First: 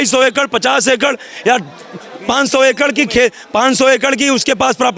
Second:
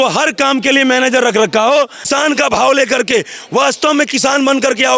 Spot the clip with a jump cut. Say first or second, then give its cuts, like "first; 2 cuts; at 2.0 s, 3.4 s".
second; 1 cut; at 2.0 s